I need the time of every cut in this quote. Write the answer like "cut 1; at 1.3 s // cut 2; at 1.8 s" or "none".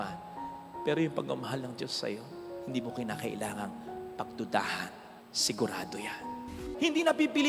cut 1; at 6.6 s